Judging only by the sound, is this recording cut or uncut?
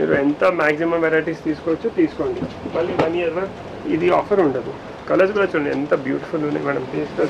uncut